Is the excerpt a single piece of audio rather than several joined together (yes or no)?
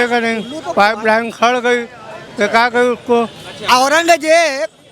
no